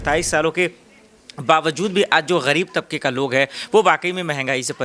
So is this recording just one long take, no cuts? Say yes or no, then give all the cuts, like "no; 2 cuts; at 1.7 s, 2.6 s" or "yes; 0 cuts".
yes; 0 cuts